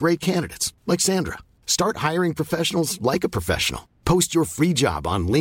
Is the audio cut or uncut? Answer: uncut